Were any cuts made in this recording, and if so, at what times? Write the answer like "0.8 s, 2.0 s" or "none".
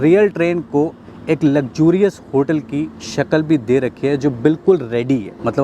none